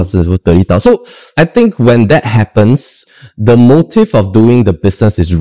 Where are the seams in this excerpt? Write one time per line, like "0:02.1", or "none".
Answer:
0:01.3
0:03.0